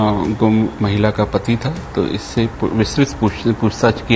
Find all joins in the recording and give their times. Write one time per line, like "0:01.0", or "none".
none

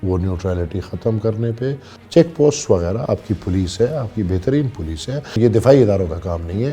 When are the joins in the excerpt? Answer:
0:01.9
0:05.3

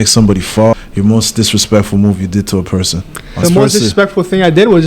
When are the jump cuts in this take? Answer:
0:00.7
0:03.4

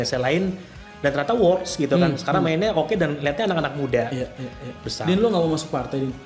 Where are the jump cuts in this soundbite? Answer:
0:04.8

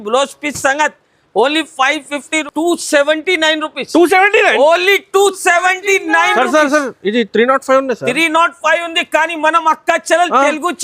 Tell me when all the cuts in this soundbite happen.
0:02.4

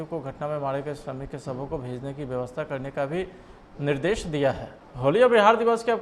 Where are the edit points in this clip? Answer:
0:05.0

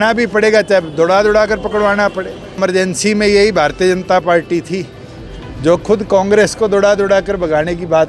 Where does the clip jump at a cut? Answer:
0:02.6

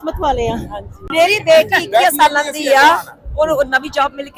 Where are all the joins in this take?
0:01.0

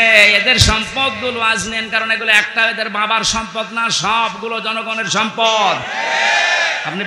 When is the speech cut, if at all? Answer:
none

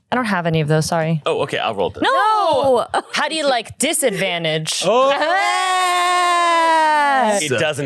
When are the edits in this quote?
0:03.2

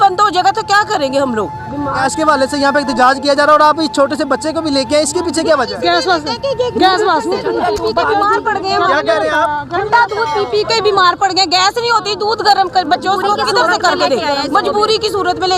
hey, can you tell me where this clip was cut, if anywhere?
0:02.0

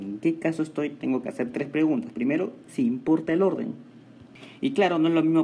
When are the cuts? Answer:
0:00.9

